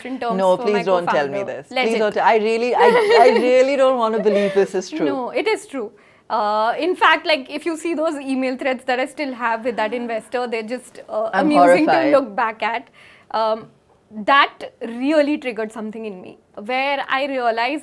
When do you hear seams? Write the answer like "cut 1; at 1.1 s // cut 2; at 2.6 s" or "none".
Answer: none

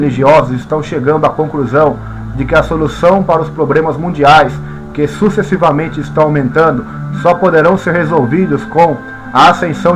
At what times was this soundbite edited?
cut 1; at 1.5 s

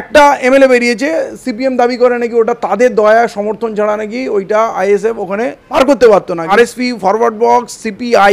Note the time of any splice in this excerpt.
cut 1; at 5.6 s // cut 2; at 6.4 s

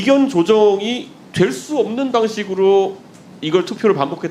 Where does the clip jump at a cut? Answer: none

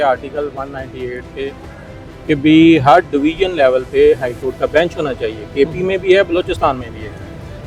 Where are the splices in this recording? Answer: none

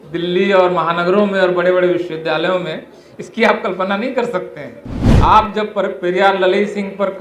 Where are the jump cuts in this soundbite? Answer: cut 1; at 5.0 s

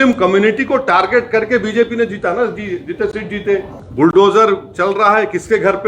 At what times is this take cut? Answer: cut 1; at 3.8 s

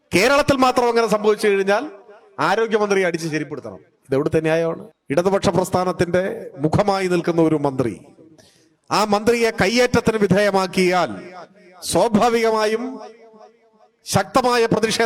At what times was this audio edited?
cut 1; at 4.9 s

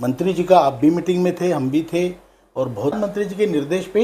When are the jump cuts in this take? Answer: cut 1; at 3.0 s

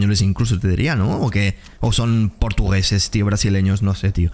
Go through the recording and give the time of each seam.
none

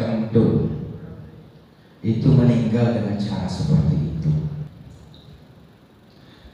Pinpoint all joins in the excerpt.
cut 1; at 4.7 s

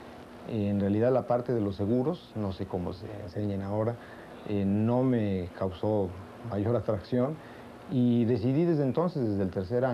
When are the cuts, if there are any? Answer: cut 1; at 2.1 s

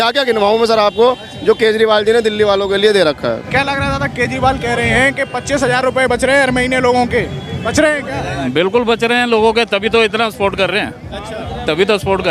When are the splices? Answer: cut 1; at 3.4 s

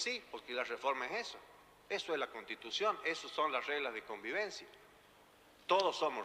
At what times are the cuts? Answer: cut 1; at 3.6 s

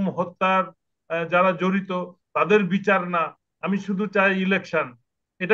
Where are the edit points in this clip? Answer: none

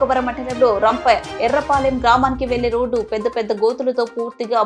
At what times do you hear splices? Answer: none

